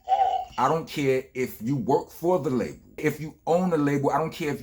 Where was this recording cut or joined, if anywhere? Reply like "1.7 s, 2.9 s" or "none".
3.0 s